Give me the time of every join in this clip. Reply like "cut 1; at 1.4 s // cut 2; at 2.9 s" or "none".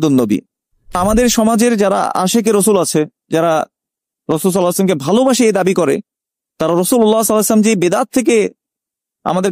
cut 1; at 1.0 s